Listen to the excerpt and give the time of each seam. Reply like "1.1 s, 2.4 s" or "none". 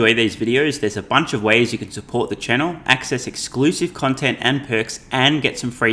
none